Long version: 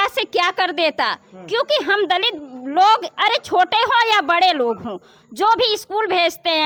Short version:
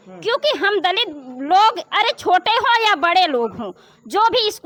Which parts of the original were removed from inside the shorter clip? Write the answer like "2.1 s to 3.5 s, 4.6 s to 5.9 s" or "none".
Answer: none

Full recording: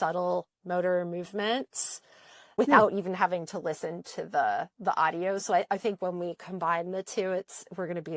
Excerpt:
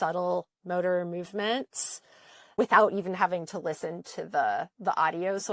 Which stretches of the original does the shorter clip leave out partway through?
none

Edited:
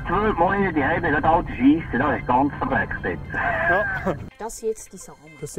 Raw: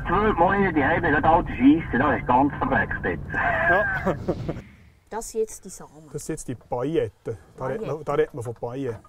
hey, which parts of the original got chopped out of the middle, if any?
4.2 s to 4.9 s

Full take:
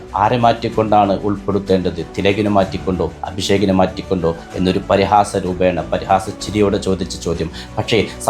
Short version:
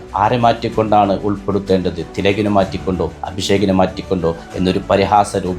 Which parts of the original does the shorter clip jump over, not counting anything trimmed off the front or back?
none

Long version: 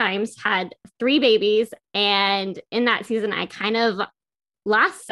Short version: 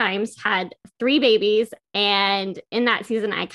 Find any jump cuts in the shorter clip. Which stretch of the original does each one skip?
none

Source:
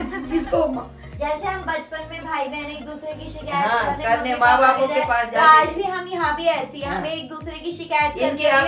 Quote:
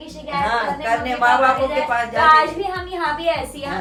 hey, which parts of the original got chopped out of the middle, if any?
none

